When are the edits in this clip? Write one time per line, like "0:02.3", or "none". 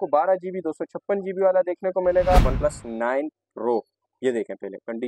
0:02.4